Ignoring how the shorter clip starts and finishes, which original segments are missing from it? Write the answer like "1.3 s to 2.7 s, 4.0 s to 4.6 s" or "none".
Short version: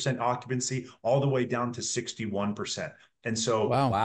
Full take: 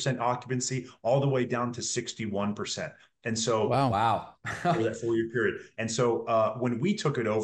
none